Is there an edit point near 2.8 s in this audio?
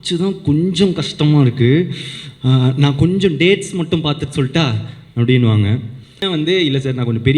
no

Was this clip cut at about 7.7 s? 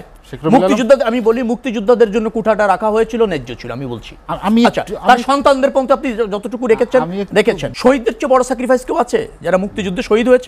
yes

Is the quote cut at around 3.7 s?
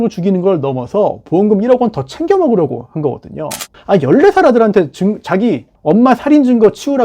yes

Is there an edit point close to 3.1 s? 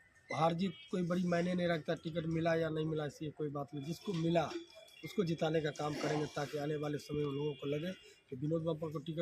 no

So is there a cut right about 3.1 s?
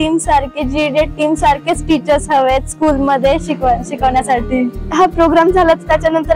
no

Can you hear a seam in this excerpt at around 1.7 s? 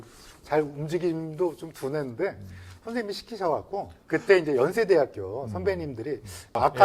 no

